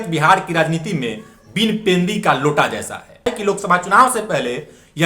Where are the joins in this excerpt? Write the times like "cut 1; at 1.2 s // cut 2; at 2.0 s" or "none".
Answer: cut 1; at 3.3 s